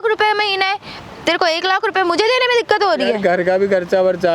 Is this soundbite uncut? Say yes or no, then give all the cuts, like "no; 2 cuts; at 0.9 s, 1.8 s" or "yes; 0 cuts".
yes; 0 cuts